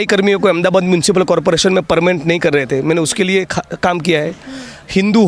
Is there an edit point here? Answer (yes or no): no